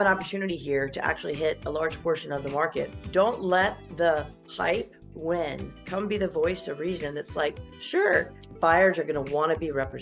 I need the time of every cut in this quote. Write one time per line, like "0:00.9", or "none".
0:03.0
0:08.4